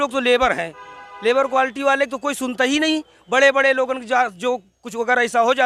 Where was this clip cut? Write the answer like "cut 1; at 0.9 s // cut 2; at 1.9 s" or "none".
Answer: none